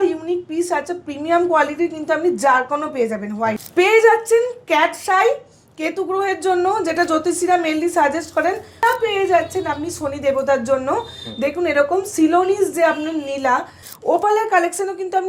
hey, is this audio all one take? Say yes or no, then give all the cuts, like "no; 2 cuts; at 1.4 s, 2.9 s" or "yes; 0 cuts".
no; 3 cuts; at 3.6 s, 8.8 s, 13.8 s